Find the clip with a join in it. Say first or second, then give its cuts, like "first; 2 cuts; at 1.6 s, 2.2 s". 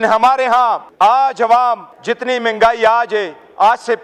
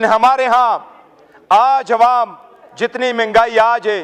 first; 2 cuts; at 0.9 s, 1.9 s